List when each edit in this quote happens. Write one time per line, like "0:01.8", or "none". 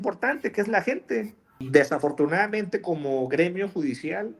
0:01.6